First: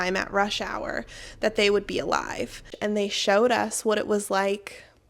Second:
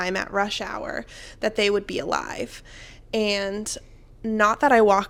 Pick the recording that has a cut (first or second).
first